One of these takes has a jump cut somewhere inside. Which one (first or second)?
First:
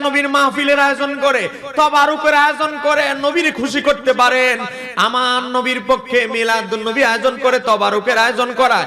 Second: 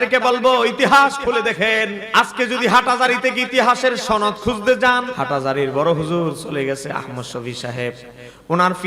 second